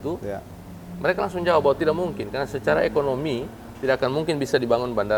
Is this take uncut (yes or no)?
yes